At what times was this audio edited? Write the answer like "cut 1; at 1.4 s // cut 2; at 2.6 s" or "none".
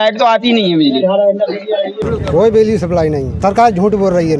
cut 1; at 2.0 s // cut 2; at 3.4 s

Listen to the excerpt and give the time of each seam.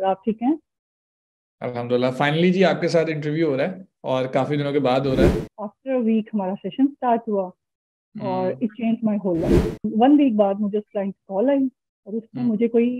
cut 1; at 5.5 s // cut 2; at 9.9 s

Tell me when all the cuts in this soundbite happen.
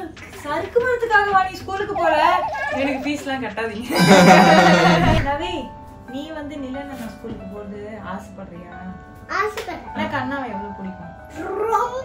cut 1; at 5.2 s

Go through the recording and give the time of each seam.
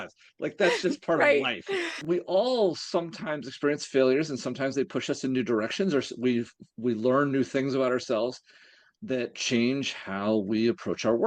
cut 1; at 2.0 s

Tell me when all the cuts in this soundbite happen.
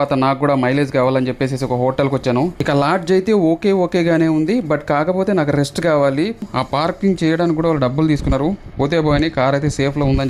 cut 1; at 2.6 s // cut 2; at 6.4 s

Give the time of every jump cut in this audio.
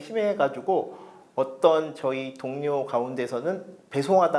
none

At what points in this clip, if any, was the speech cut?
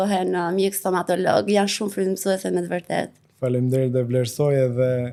none

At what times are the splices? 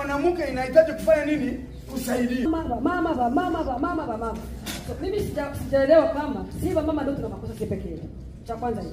cut 1; at 2.5 s

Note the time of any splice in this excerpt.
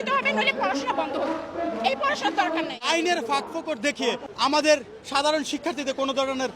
cut 1; at 2.8 s // cut 2; at 4.3 s

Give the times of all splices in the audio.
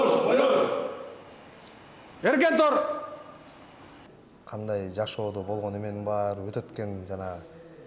cut 1; at 4.0 s

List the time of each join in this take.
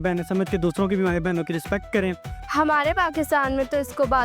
cut 1; at 2.3 s

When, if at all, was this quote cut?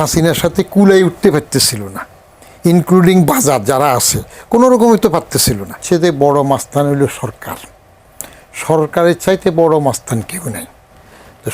cut 1; at 5.8 s

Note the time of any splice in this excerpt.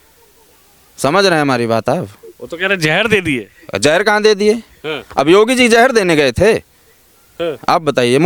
none

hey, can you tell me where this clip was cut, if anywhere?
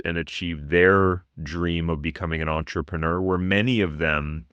none

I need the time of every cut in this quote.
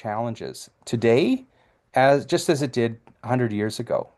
none

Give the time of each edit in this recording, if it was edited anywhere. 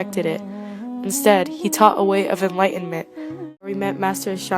cut 1; at 3.7 s

